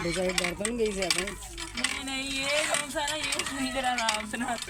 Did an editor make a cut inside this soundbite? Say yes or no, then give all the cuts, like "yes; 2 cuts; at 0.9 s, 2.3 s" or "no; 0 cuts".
no; 0 cuts